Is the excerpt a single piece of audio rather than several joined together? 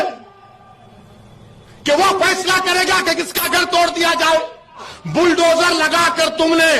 no; 1 cut; at 4.9 s

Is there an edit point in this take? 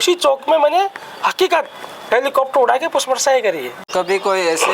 yes; 1 cut; at 3.7 s

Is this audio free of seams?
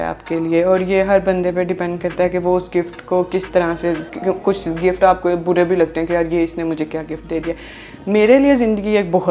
yes; 0 cuts

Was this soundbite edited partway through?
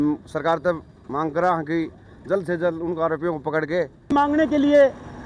yes; 1 cut; at 4.1 s

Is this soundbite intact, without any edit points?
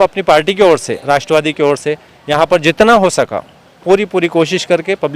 yes; 0 cuts

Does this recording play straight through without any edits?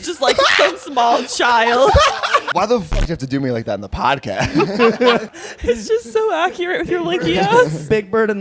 no; 2 cuts; at 2.1 s, 5.3 s

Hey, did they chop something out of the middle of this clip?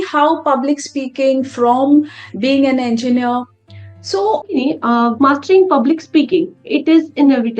yes; 1 cut; at 4.5 s

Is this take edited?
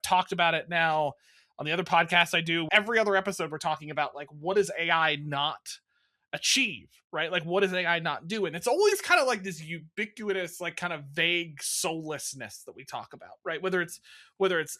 yes; 1 cut; at 2.7 s

